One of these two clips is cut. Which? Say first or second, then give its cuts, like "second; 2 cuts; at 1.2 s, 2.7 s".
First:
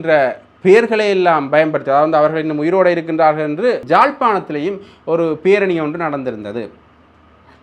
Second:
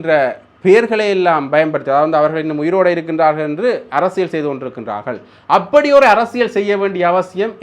first; 1 cut; at 3.8 s